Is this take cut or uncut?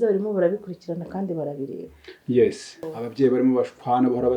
cut